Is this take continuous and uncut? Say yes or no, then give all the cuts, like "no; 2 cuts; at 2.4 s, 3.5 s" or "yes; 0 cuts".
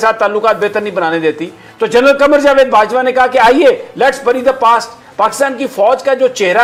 yes; 0 cuts